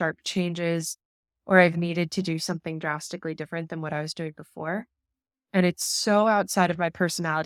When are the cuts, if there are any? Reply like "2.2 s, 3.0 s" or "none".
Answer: none